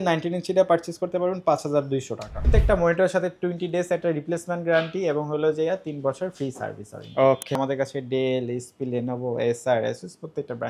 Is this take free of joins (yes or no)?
no